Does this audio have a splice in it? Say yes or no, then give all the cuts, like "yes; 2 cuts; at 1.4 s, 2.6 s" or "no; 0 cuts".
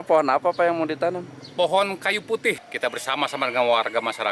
yes; 1 cut; at 2.6 s